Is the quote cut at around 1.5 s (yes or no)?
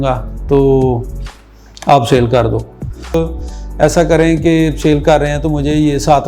no